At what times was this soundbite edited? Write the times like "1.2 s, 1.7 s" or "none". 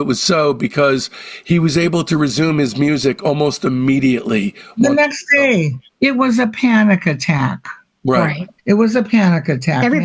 5.8 s, 8.5 s